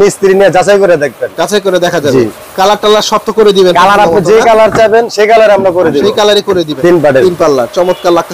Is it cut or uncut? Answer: cut